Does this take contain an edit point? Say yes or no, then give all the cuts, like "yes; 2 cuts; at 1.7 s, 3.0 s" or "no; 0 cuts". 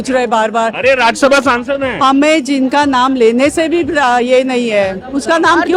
no; 0 cuts